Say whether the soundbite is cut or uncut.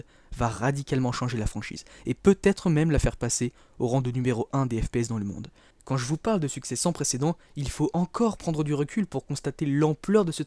cut